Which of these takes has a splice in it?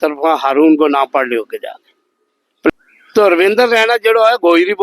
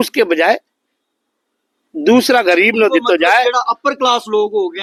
first; 1 cut; at 2.7 s

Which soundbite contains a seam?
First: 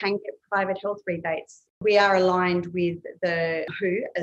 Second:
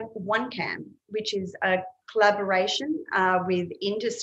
first; 1 cut; at 1.8 s

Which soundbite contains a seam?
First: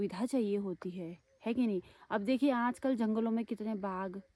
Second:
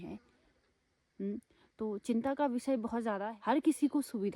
second; 1 cut; at 3.3 s

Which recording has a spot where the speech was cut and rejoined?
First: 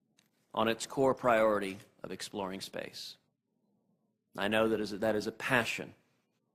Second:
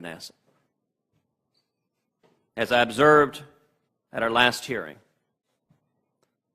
second; 1 cut; at 4.9 s

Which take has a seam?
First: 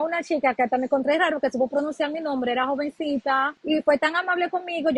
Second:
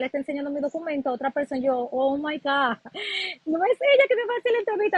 first; 1 cut; at 3.5 s

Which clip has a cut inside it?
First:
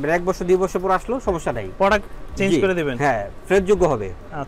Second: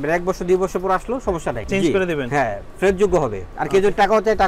second; 2 cuts; at 1.6 s, 3.5 s

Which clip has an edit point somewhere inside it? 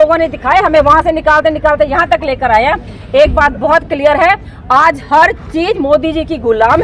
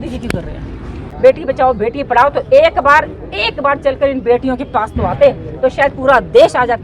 second; 1 cut; at 1.1 s

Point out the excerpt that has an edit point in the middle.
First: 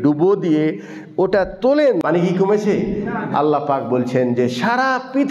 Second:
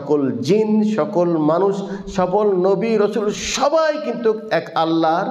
first; 1 cut; at 2.0 s

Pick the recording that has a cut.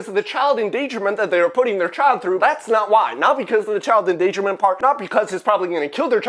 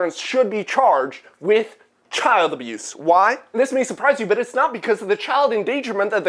first; 2 cuts; at 2.4 s, 4.8 s

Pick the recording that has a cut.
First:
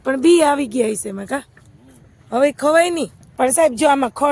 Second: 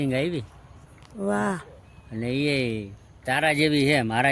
first; 1 cut; at 3.2 s

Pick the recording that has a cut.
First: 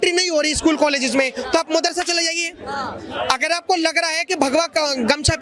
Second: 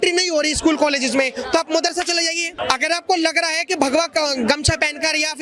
second; 1 cut; at 2.5 s

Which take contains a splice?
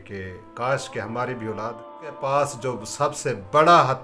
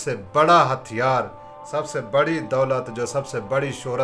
first; 1 cut; at 2.2 s

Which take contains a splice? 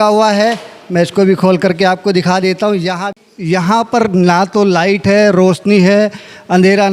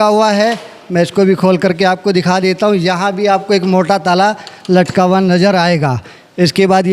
first; 1 cut; at 3.1 s

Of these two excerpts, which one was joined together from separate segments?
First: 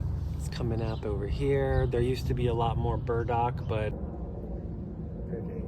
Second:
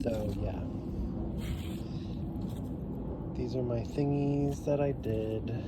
first; 1 cut; at 4.0 s

